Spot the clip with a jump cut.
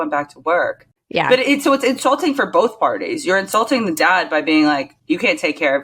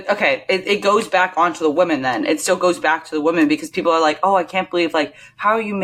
first; 2 cuts; at 1.3 s, 4.9 s

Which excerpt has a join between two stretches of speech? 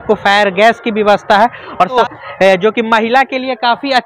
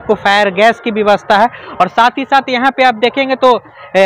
first; 1 cut; at 2.0 s

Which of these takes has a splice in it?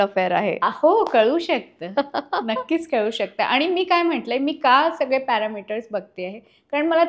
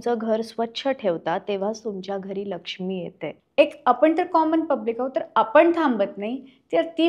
second; 1 cut; at 3.3 s

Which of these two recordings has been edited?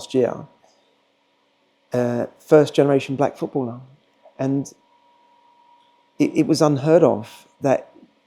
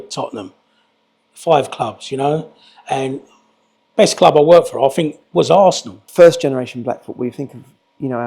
second; 1 cut; at 6.1 s

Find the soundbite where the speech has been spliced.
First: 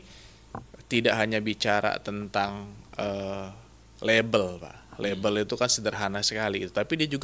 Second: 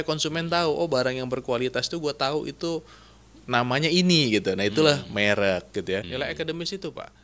second; 1 cut; at 6.1 s

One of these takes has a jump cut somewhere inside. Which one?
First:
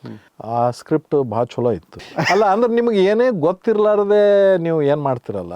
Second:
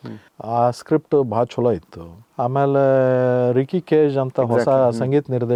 first; 1 cut; at 2.0 s

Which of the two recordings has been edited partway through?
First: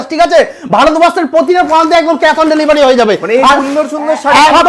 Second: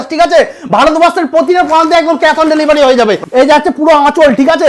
second; 1 cut; at 3.2 s

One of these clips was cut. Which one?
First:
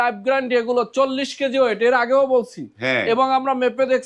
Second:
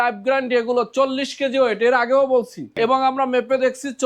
second; 1 cut; at 2.7 s

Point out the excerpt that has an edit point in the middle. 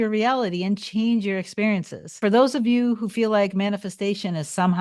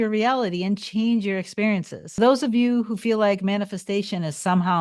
second; 1 cut; at 2.2 s

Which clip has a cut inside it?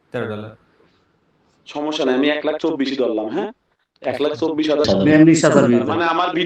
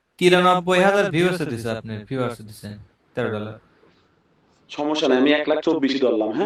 first; 1 cut; at 4.9 s

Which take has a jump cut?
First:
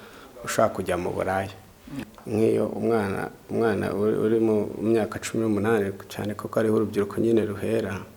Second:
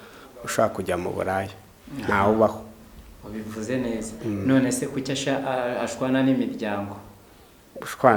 first; 1 cut; at 1.9 s

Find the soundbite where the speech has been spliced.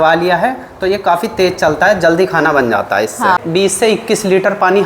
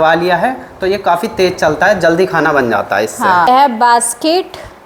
first; 1 cut; at 3.4 s

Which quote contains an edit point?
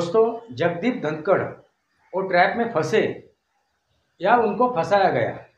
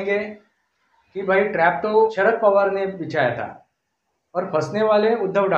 second; 1 cut; at 2.1 s

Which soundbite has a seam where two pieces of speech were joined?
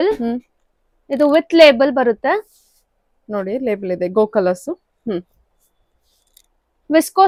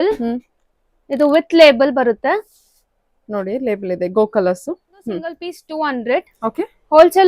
second; 1 cut; at 5.6 s

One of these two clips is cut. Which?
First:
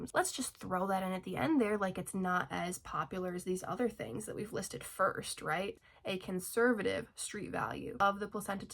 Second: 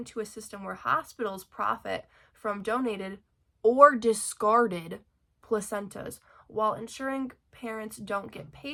first; 1 cut; at 5.8 s

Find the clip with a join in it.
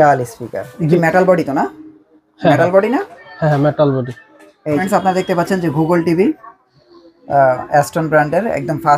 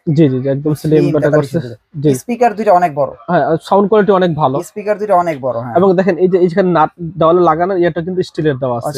first; 2 cuts; at 0.9 s, 4.8 s

